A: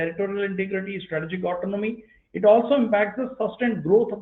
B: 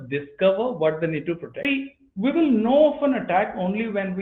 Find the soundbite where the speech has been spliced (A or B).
B